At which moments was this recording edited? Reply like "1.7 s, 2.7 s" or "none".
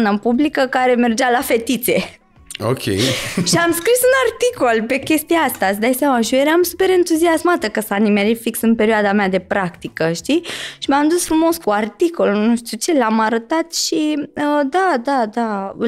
none